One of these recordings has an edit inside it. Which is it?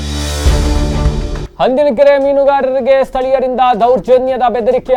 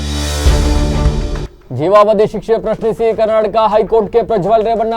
second; 1 cut; at 1.4 s

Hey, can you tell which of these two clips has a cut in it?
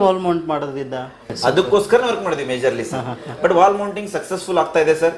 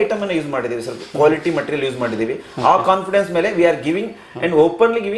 first; 1 cut; at 1.2 s

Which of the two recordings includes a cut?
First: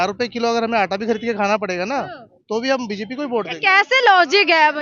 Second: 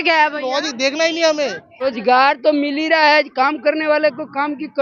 second; 1 cut; at 1.8 s

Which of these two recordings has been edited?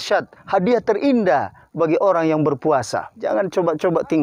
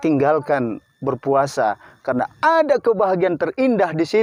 first; 1 cut; at 3.1 s

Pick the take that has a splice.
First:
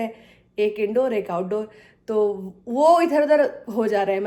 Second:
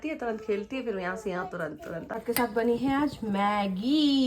second; 1 cut; at 2.1 s

